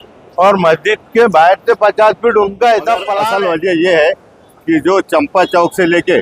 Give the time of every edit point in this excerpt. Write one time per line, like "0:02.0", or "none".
0:03.2